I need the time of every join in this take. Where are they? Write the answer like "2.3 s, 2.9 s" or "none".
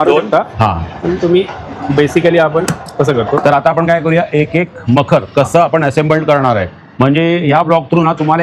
3.4 s